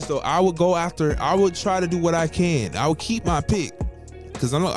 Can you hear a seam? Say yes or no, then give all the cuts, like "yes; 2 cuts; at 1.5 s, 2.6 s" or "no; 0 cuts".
no; 0 cuts